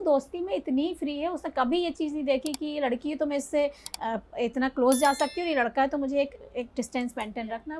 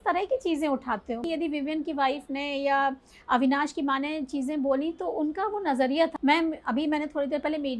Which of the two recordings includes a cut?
second; 2 cuts; at 1.2 s, 6.1 s

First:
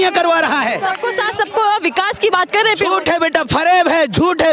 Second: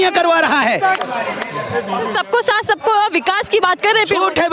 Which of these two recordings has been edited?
first; 1 cut; at 1.0 s

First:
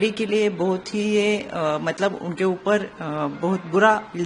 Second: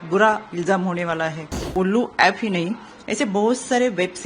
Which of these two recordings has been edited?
second; 1 cut; at 1.7 s

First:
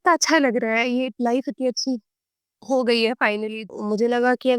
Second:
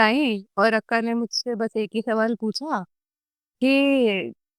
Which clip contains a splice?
first; 1 cut; at 3.6 s

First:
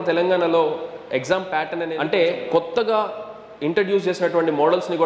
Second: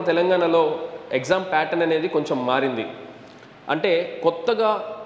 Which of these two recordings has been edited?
first; 1 cut; at 1.9 s

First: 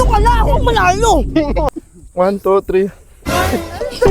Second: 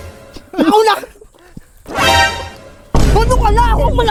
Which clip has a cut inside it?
first; 1 cut; at 1.7 s

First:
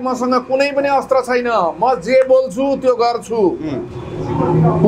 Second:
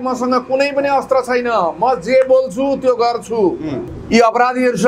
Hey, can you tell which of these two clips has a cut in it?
second; 1 cut; at 3.9 s

